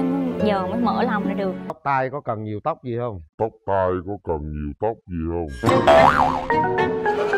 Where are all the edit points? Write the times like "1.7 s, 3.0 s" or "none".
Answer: 1.8 s